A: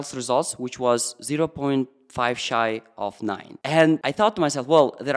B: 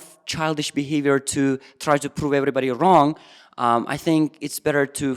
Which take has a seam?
A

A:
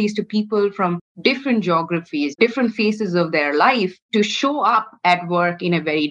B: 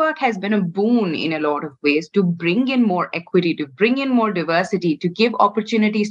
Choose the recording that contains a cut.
A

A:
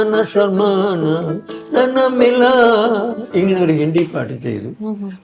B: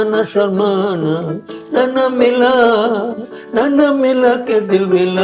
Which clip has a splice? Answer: A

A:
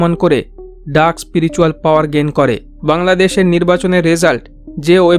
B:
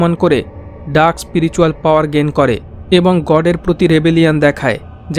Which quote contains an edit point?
A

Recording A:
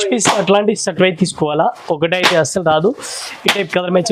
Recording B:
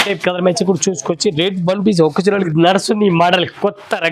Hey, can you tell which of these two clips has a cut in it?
B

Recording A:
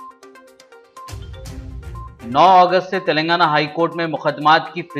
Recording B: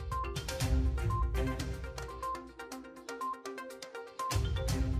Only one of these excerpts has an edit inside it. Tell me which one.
A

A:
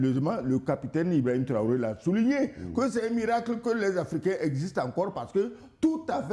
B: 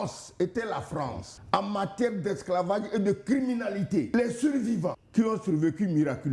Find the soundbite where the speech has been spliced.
B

